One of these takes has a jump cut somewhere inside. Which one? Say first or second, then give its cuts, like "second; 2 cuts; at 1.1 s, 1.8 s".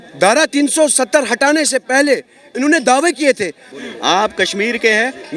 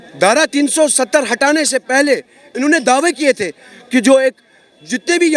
first; 1 cut; at 3.7 s